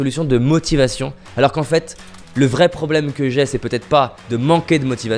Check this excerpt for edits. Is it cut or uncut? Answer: uncut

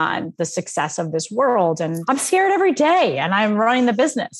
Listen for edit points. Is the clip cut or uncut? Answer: cut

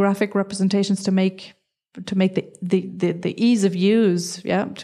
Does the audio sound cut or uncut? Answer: uncut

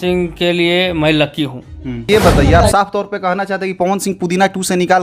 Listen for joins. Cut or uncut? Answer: cut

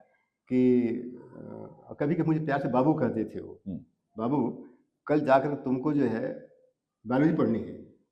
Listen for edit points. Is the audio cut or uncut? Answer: uncut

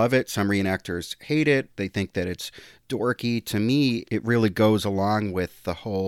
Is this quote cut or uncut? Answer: cut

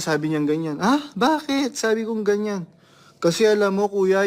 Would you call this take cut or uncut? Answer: uncut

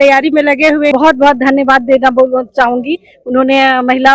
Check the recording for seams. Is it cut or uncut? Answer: cut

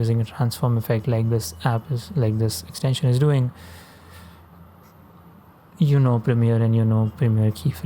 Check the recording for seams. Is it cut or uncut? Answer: uncut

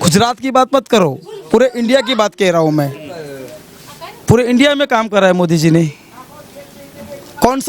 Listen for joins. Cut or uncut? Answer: uncut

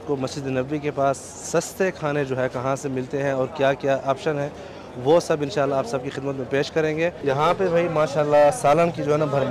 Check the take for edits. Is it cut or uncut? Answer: cut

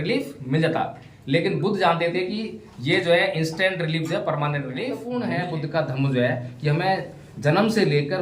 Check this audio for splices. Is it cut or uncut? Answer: cut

